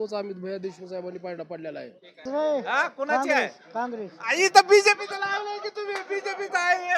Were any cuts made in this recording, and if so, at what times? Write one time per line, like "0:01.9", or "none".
0:02.2